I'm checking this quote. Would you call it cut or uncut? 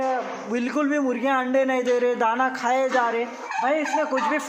cut